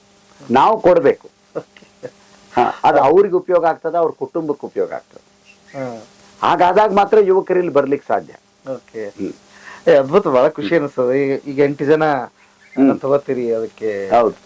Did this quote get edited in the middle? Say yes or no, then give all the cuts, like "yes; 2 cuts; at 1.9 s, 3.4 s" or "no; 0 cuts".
no; 0 cuts